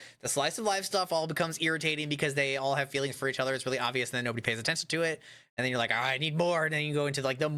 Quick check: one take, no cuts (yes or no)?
yes